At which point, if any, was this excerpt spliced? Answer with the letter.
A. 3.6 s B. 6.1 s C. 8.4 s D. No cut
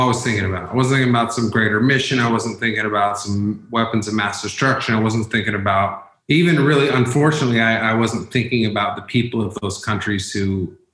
B